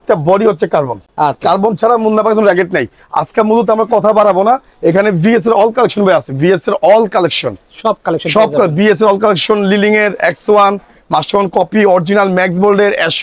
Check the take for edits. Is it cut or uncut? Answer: uncut